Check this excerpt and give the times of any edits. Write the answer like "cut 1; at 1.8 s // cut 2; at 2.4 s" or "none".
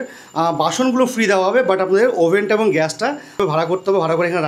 cut 1; at 3.4 s